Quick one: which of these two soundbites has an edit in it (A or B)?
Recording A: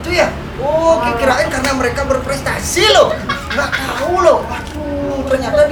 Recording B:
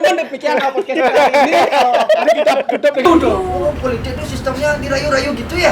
B